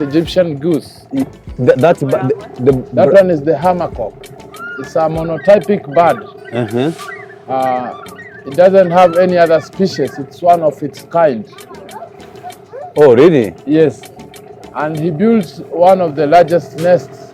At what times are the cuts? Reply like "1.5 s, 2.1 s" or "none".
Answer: none